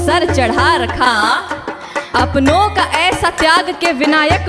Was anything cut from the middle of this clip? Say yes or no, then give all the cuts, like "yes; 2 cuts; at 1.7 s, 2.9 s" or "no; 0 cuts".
yes; 1 cut; at 2.1 s